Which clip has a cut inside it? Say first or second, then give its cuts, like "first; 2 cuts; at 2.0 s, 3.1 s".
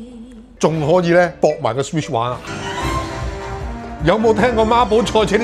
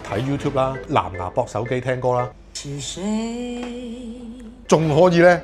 first; 1 cut; at 2.4 s